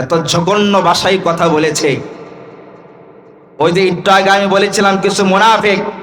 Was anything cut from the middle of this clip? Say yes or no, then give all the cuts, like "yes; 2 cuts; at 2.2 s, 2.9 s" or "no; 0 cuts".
no; 0 cuts